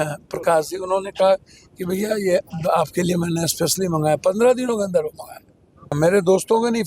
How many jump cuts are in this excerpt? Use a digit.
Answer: 1